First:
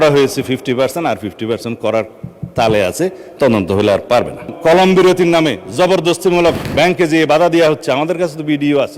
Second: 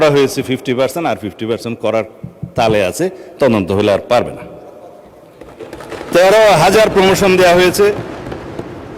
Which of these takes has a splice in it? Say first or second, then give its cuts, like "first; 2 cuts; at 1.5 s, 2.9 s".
first; 1 cut; at 4.5 s